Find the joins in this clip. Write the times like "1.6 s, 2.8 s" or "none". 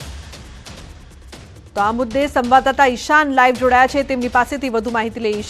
1.6 s